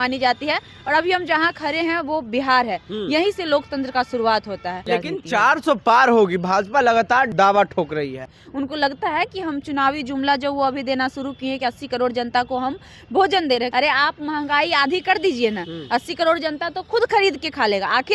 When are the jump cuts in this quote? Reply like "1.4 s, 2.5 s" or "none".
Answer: 4.8 s, 7.3 s, 8.4 s, 13.7 s